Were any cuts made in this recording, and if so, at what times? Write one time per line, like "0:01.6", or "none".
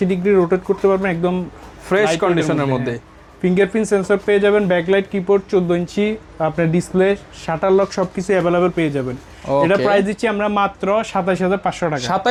none